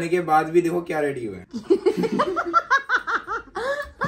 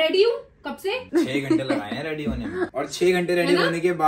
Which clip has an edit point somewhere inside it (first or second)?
second